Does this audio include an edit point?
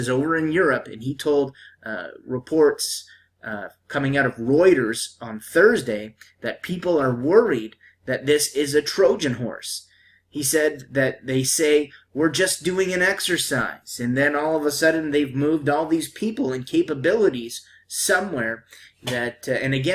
yes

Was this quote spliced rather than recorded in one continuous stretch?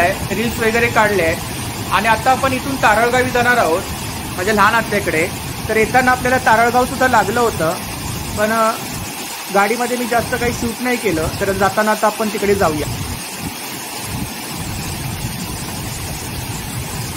no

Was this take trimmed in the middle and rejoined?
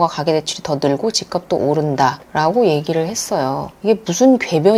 no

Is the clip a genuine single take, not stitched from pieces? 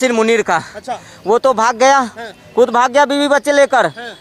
yes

